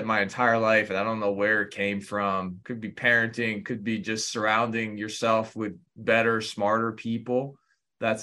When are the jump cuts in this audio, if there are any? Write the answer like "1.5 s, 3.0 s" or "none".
2.6 s, 5.9 s